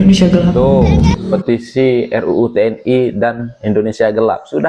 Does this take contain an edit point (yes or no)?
yes